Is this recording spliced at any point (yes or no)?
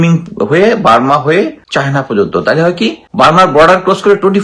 yes